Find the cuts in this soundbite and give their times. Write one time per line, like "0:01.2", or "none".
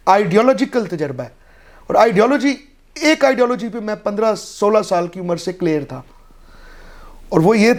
none